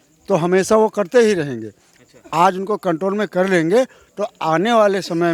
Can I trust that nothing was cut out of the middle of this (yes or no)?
yes